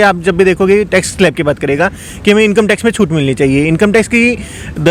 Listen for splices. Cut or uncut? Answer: uncut